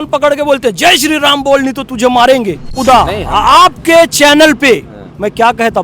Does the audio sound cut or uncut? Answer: cut